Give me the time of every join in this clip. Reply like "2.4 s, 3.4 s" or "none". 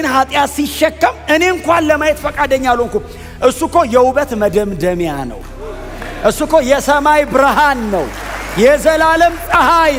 none